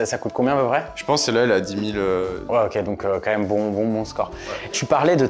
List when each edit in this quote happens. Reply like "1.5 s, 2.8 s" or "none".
none